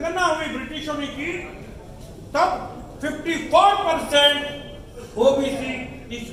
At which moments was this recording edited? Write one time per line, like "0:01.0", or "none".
none